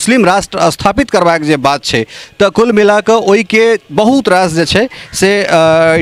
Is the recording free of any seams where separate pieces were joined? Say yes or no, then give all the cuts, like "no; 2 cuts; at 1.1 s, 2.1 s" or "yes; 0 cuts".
yes; 0 cuts